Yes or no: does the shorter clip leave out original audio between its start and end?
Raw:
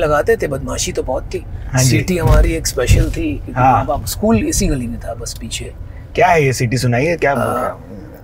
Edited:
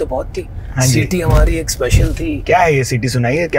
yes